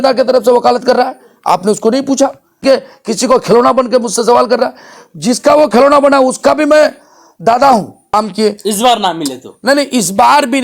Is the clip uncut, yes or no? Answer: no